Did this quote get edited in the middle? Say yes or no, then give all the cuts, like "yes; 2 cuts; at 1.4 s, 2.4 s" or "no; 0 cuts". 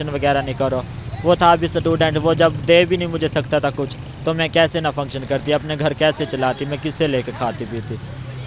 no; 0 cuts